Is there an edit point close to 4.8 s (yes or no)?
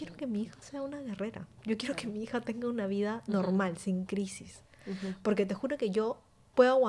no